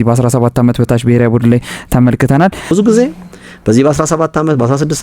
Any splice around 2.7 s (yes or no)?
yes